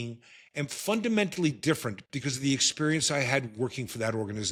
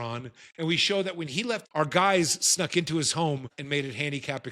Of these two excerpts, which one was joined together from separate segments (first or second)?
second